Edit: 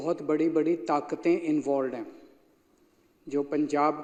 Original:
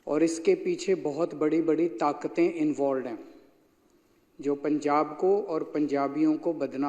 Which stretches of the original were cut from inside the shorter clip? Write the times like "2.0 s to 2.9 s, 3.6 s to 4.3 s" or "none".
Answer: none